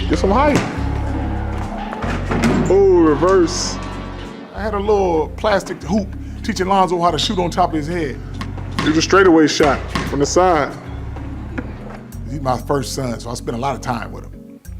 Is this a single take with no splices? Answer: no; 1 cut; at 4.9 s

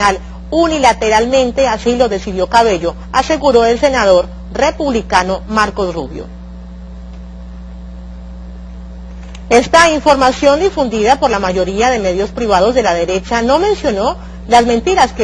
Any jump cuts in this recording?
yes; 1 cut; at 4.9 s

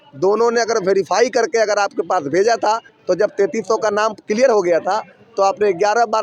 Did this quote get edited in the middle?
yes; 1 cut; at 2.9 s

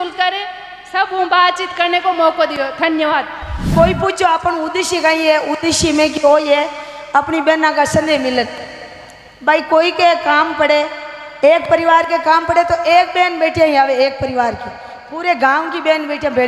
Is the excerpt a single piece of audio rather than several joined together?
no; 1 cut; at 3.7 s

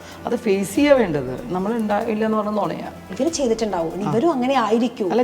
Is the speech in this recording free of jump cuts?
no; 1 cut; at 3.1 s

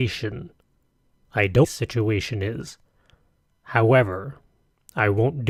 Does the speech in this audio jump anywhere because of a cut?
no; 0 cuts

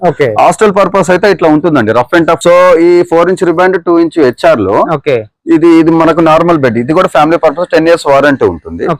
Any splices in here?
yes; 1 cut; at 2.4 s

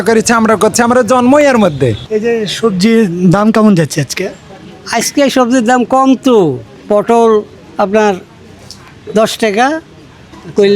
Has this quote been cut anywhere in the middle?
yes; 2 cuts; at 2.1 s, 6.7 s

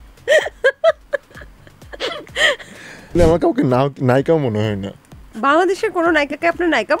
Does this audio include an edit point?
yes; 1 cut; at 3.2 s

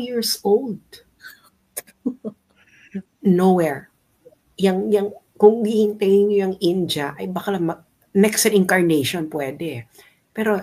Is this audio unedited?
no; 1 cut; at 3.0 s

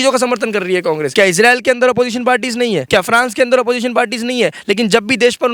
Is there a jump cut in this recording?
yes; 2 cuts; at 1.1 s, 2.8 s

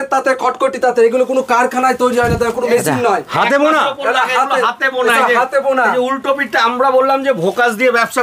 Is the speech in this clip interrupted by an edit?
no; 0 cuts

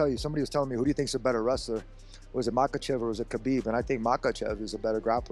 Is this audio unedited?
yes; 0 cuts

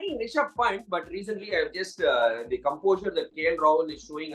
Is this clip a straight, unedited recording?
yes; 0 cuts

